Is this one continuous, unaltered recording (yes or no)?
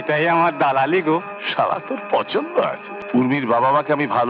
no